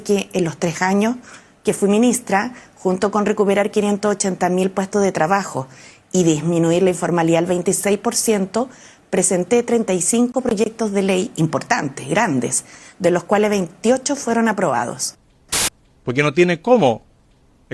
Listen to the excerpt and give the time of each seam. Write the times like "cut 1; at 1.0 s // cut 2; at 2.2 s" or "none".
cut 1; at 15.4 s